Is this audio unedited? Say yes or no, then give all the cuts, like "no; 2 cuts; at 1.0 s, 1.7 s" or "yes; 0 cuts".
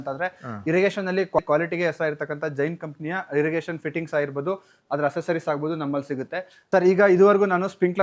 no; 2 cuts; at 1.4 s, 6.5 s